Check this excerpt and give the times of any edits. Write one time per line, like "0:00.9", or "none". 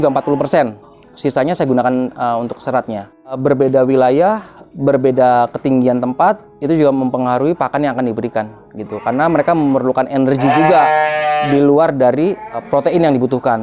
0:03.4
0:12.6